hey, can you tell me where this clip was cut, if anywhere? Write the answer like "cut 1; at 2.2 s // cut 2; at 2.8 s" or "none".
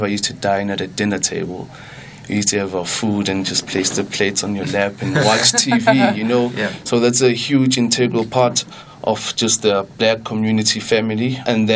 none